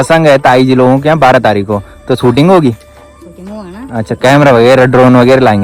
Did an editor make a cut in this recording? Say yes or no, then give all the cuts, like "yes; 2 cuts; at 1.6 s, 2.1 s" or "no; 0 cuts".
no; 0 cuts